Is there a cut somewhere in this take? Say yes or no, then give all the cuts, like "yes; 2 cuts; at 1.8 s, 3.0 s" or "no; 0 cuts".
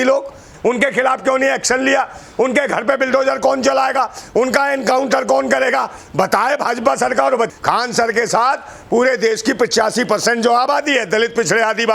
yes; 1 cut; at 7.5 s